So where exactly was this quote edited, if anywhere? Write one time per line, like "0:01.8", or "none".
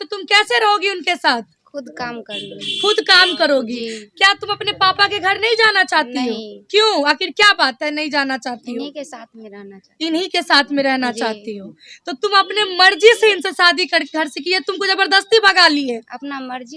none